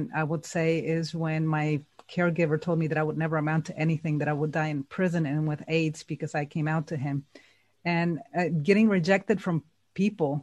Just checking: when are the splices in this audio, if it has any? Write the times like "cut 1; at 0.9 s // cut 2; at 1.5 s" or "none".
none

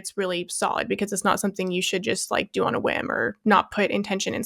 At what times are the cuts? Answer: cut 1; at 3.4 s

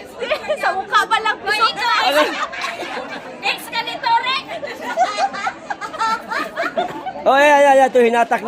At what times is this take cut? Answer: cut 1; at 7.0 s

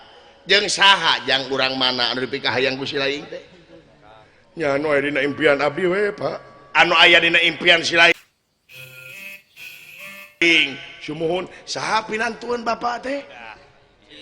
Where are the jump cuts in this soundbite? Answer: none

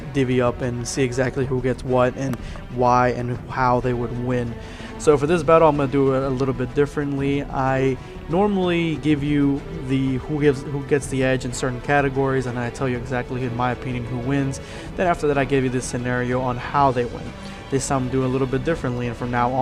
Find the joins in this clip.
none

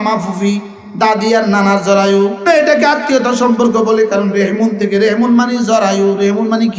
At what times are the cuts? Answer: cut 1; at 2.4 s

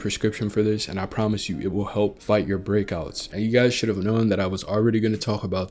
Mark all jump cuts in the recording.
cut 1; at 3.2 s

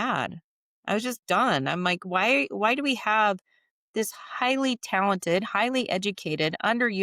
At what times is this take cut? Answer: none

